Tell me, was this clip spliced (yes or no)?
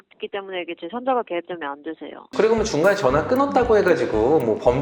yes